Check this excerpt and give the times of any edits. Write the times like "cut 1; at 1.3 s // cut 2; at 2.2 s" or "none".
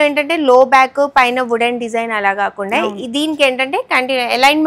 none